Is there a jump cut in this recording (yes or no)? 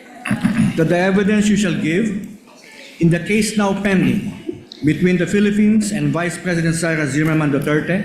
no